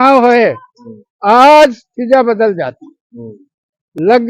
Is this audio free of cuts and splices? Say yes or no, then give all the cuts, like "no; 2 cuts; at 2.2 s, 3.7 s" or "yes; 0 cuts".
yes; 0 cuts